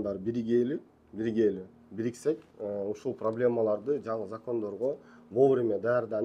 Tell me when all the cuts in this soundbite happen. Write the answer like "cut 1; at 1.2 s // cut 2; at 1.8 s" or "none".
none

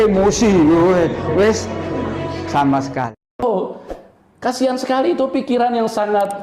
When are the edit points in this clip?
cut 1; at 3.4 s

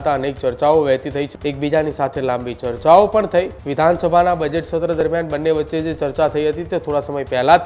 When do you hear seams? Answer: cut 1; at 1.3 s // cut 2; at 3.6 s

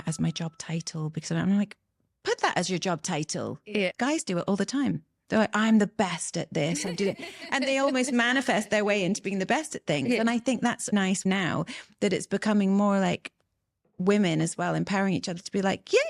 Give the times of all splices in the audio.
none

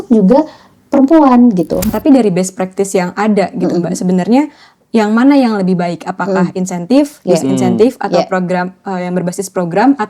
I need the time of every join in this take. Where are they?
cut 1; at 1.9 s

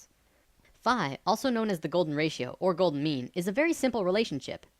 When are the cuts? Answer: cut 1; at 2.1 s

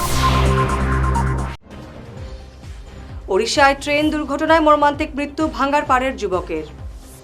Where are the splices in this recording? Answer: cut 1; at 1.6 s

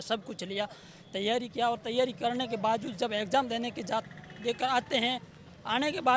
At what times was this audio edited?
none

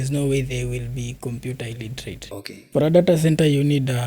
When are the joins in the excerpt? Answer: cut 1; at 2.2 s

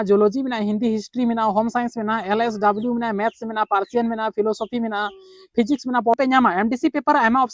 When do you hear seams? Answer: cut 1; at 6.1 s

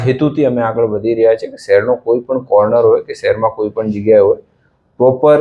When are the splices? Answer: none

